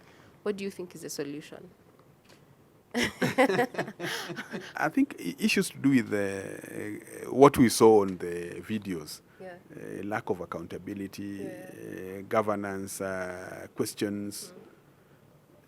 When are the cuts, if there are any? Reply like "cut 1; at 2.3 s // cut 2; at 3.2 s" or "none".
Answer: none